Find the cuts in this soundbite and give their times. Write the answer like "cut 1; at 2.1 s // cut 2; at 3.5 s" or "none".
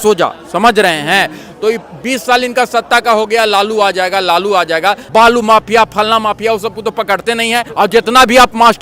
cut 1; at 5.0 s // cut 2; at 7.7 s